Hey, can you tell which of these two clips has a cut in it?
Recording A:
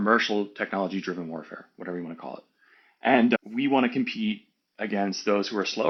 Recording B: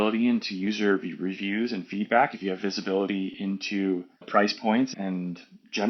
B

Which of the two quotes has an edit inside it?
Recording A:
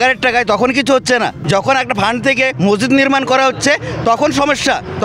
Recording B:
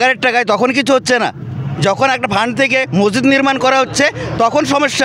A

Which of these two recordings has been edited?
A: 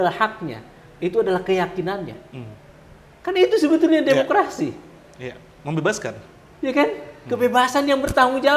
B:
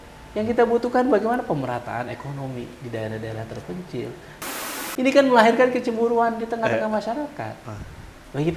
B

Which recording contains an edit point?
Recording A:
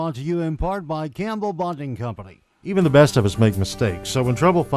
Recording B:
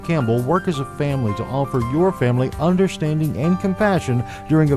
A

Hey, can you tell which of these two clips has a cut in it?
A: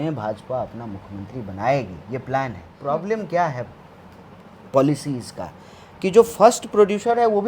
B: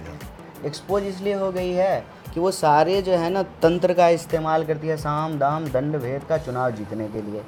A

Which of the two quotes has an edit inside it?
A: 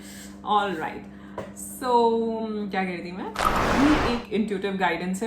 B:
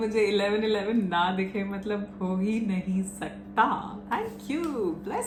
A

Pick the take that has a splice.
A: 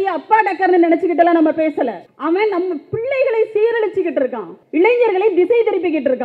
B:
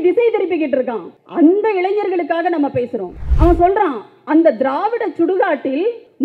B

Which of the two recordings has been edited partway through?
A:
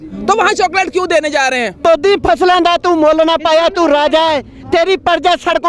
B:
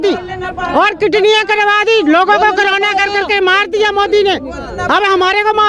A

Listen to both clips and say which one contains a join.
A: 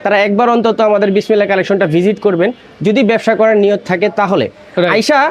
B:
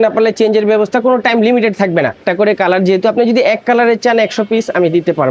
B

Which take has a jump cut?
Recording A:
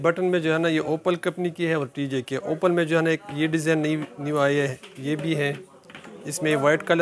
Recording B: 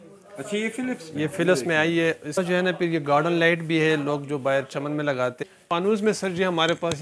B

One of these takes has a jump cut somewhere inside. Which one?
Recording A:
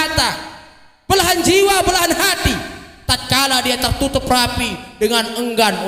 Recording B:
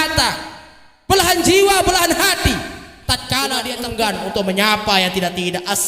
B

